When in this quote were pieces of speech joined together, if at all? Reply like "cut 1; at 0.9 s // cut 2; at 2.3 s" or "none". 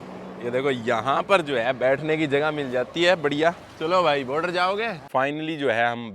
cut 1; at 5.0 s